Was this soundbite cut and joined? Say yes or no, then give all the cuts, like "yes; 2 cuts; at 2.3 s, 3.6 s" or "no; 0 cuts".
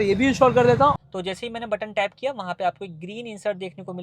yes; 1 cut; at 1.0 s